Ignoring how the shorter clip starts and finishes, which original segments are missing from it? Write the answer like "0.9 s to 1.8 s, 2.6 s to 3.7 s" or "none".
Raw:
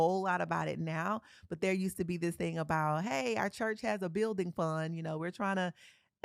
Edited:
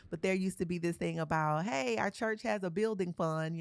none